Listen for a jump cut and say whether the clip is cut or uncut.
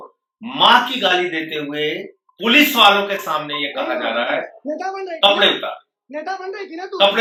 uncut